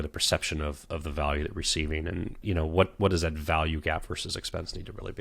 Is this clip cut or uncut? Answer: cut